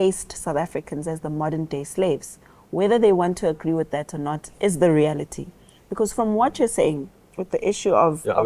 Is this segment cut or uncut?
uncut